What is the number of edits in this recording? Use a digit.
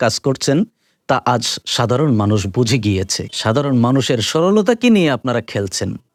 0